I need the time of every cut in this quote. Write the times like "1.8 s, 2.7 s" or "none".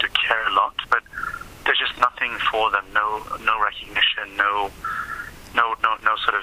none